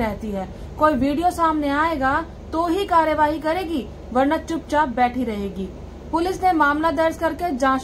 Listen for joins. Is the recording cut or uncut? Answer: uncut